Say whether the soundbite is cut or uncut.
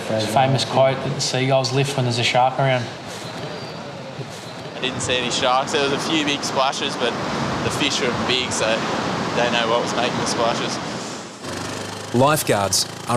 uncut